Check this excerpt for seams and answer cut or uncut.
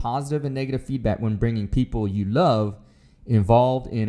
uncut